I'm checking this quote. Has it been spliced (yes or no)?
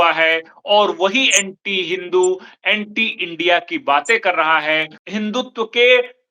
yes